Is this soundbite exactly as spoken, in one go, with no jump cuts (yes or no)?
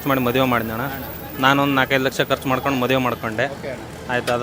yes